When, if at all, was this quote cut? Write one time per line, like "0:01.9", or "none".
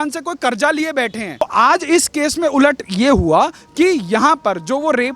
0:01.4